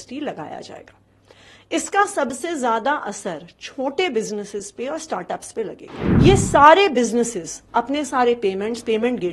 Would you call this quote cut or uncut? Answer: cut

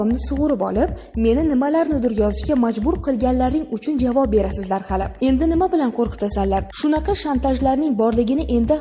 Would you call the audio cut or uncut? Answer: uncut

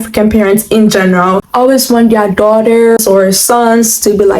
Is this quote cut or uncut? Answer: cut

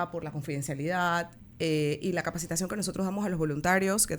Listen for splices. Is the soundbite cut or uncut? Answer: cut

